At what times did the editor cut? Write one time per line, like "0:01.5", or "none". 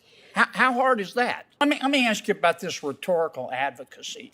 0:01.6